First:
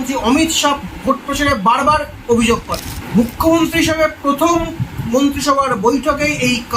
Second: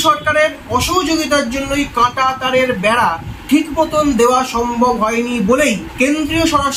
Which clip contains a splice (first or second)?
first